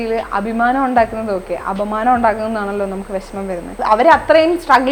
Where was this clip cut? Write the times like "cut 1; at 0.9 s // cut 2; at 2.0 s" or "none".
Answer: cut 1; at 3.8 s